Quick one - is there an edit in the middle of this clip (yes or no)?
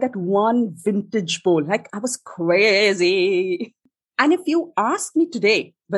yes